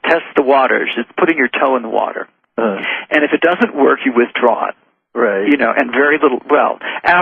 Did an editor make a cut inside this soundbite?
no; 0 cuts

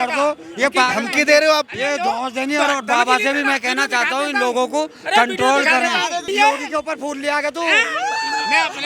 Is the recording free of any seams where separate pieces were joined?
no; 1 cut; at 6.3 s

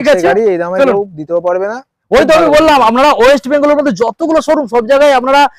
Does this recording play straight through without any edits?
yes; 0 cuts

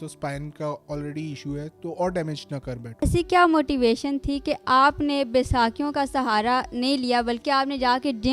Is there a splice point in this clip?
yes; 1 cut; at 3.0 s

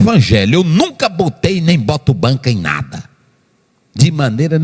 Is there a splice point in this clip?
no; 0 cuts

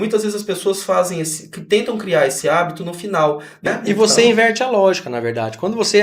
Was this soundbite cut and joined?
yes; 1 cut; at 3.7 s

